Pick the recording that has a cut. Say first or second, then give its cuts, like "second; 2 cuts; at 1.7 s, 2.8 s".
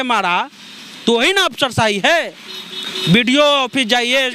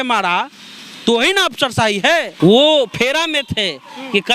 second; 1 cut; at 2.3 s